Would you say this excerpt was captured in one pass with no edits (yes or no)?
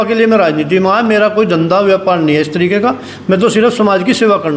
yes